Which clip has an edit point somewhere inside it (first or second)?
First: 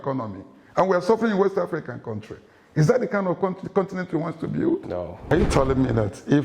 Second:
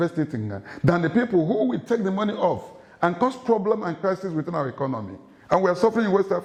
first